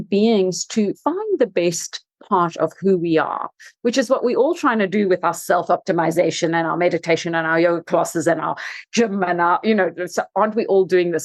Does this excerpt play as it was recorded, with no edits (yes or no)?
no